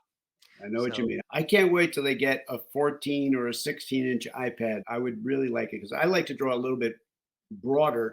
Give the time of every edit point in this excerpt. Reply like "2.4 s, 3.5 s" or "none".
1.2 s, 4.8 s